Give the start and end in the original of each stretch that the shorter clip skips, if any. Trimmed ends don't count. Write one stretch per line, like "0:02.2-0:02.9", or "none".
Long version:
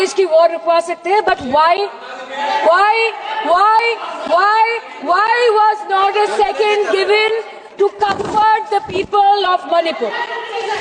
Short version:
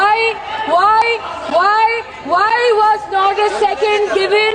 none